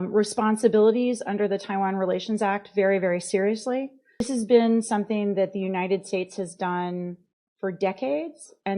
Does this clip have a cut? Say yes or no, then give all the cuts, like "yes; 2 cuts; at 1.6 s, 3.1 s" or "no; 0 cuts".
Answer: yes; 1 cut; at 4.2 s